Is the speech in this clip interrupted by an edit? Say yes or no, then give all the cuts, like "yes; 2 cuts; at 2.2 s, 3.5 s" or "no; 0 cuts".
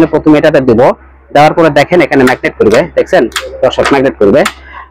no; 0 cuts